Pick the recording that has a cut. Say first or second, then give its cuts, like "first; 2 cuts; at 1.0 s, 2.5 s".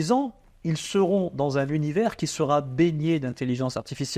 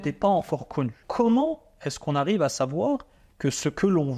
second; 1 cut; at 1.0 s